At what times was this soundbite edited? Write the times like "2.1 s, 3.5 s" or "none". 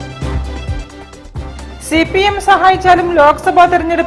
none

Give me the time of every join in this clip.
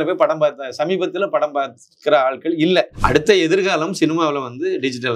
2.9 s

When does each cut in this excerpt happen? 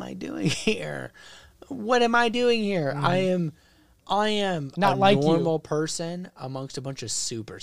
none

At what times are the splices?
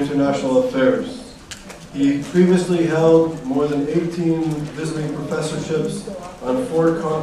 3.7 s

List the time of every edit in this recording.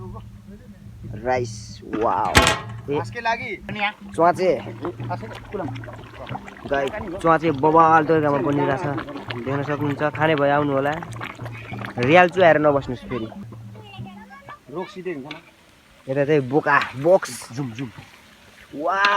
3.7 s, 13.5 s

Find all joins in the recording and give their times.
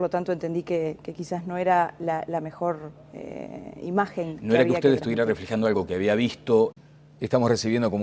none

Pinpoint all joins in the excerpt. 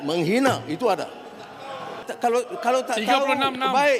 2.1 s

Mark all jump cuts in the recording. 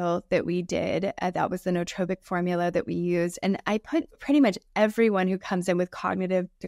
none

